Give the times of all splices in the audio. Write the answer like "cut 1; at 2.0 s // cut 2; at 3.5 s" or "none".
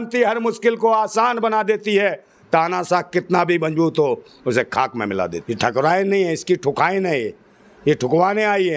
cut 1; at 5.3 s